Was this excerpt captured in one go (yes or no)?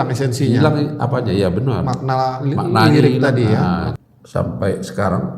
no